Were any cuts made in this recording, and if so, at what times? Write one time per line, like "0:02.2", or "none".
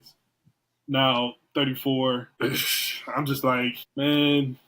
0:02.3
0:03.8